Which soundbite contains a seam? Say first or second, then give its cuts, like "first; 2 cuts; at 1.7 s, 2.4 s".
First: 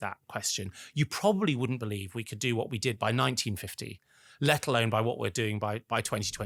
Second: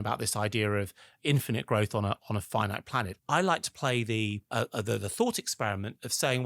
second; 3 cuts; at 1.1 s, 3.1 s, 4.4 s